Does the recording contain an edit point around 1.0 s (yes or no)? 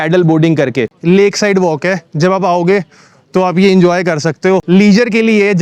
yes